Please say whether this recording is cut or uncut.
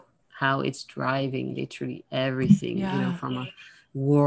uncut